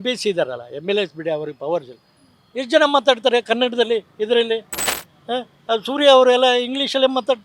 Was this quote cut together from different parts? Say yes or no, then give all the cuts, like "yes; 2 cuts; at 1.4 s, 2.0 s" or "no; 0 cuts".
no; 0 cuts